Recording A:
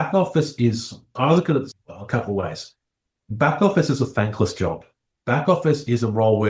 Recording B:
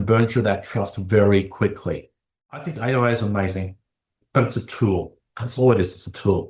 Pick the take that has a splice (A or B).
B